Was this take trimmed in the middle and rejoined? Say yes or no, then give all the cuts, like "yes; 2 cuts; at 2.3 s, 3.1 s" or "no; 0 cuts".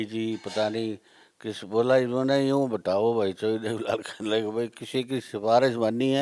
no; 0 cuts